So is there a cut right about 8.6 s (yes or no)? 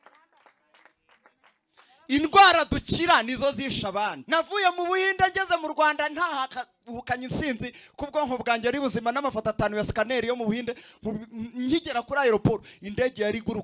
no